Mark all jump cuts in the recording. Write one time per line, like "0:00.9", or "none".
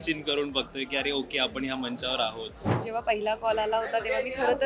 0:02.8

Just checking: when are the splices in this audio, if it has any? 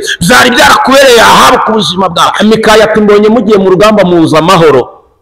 0:02.3

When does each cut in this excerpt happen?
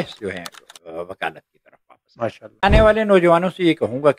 0:02.6

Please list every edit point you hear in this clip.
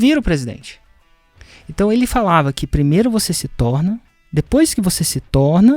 none

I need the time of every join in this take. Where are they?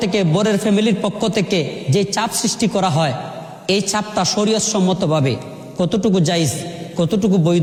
none

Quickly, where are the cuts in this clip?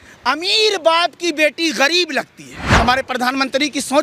0:02.6

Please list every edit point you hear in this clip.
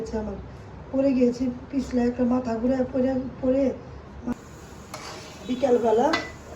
0:04.3

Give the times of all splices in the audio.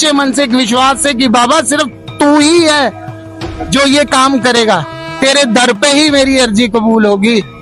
none

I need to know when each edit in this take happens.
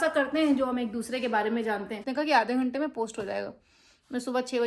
0:02.0

